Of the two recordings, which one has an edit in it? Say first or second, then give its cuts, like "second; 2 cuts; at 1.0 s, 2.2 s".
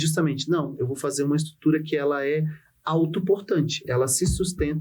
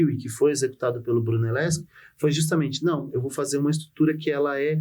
first; 1 cut; at 3.8 s